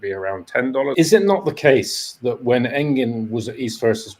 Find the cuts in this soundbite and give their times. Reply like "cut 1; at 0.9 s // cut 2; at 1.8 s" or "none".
cut 1; at 0.9 s